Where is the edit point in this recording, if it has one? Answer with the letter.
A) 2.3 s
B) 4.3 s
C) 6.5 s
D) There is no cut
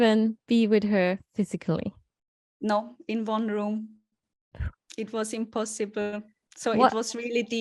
D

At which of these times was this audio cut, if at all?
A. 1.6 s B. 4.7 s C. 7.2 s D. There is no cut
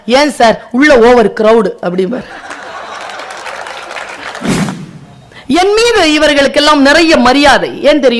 B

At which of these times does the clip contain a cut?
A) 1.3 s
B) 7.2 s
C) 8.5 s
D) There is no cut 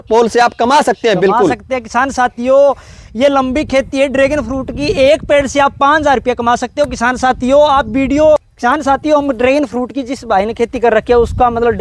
C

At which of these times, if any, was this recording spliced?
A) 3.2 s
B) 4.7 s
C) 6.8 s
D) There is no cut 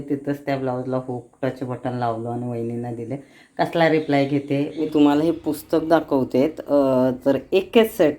B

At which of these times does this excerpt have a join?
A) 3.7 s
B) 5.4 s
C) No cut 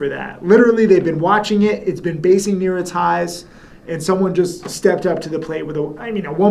C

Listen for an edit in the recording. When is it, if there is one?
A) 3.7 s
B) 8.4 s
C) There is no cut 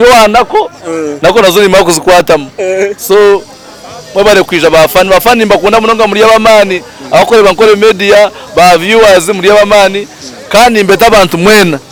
C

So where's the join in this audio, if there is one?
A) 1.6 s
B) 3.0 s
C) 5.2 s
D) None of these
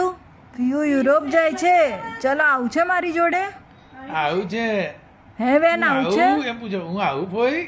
D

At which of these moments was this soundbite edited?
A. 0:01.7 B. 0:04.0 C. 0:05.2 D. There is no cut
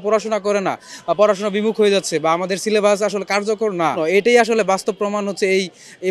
B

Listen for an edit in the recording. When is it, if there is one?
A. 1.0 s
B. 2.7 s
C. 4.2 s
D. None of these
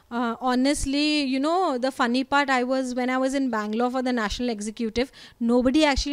D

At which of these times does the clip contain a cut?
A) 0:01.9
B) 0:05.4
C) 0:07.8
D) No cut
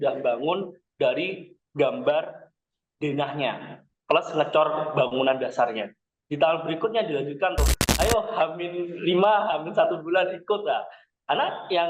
C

